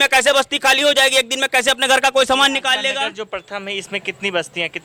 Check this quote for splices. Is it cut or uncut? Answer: uncut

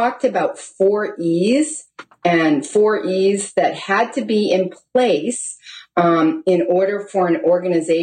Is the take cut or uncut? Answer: uncut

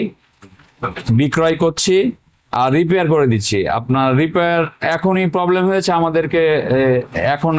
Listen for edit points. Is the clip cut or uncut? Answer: uncut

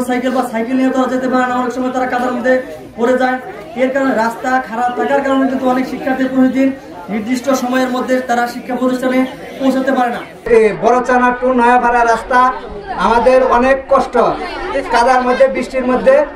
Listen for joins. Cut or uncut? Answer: cut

